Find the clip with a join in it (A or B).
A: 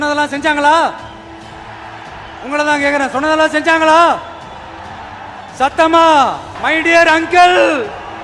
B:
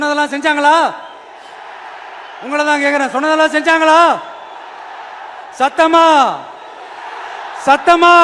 A